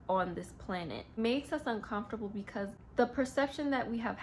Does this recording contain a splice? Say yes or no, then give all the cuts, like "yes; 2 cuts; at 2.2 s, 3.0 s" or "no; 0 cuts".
no; 0 cuts